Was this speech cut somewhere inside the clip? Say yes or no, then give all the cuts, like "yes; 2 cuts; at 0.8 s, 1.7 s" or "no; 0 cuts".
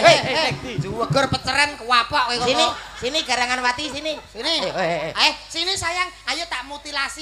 no; 0 cuts